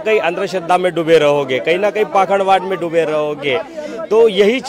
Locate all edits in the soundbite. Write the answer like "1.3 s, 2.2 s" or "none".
none